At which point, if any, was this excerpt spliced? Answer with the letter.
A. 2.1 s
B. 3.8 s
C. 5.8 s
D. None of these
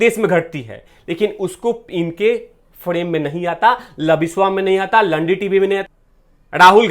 C